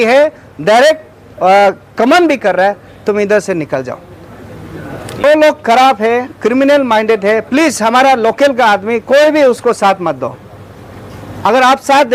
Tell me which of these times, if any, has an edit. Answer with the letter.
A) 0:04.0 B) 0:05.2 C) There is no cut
B